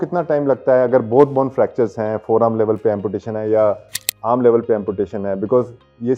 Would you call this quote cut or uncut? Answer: uncut